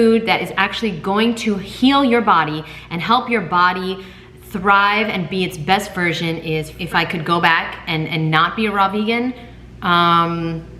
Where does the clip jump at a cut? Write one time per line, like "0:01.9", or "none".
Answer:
0:06.7

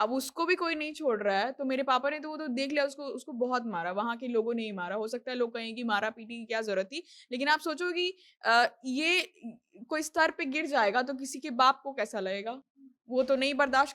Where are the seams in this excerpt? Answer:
none

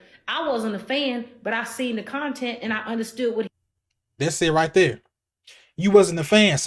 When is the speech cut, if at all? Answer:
none

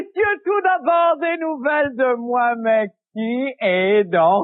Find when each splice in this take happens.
0:01.3

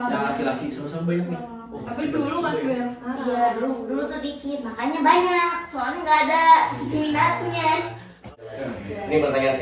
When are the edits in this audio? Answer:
0:08.3

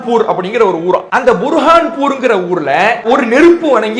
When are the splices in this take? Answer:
0:01.1
0:03.0

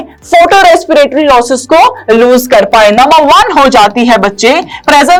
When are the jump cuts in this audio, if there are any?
none

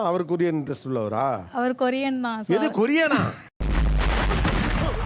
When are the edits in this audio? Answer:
none

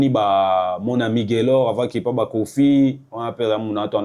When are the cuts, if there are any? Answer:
none

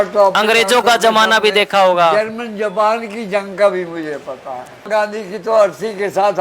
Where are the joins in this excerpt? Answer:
0:04.9

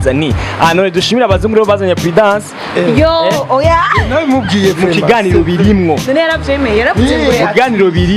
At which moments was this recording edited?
none

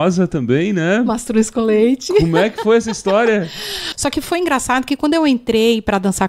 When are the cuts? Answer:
0:03.9

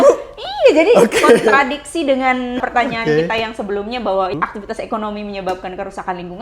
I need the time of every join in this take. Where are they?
0:02.6
0:04.4

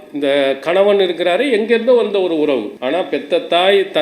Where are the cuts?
0:02.7

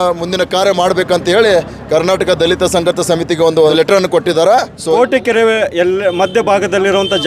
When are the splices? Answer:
0:03.7
0:05.0

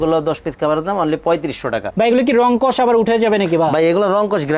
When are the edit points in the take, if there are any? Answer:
0:01.9

